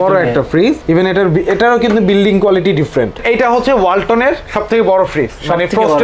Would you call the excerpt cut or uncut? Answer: cut